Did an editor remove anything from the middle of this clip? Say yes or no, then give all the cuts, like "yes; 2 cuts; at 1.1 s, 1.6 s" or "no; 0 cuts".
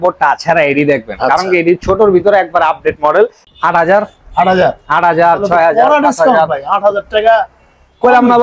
yes; 1 cut; at 3.4 s